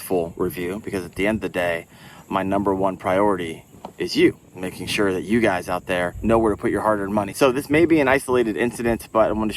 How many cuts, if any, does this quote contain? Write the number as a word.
two